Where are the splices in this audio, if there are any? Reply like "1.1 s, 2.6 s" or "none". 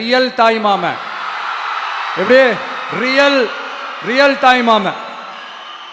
none